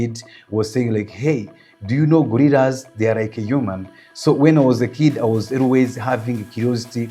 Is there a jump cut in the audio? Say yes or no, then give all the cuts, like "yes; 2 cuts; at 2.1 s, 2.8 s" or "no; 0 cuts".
no; 0 cuts